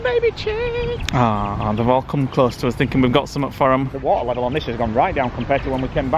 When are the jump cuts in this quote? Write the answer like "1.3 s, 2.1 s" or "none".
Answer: none

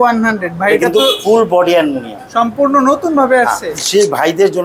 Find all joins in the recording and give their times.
3.7 s

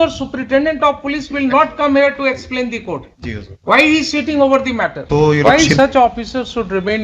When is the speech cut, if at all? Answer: 5.0 s

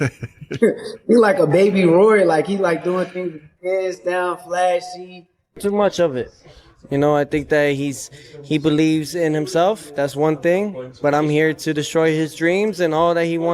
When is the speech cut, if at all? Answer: 5.6 s

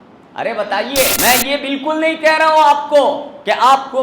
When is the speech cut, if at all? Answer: 1.1 s

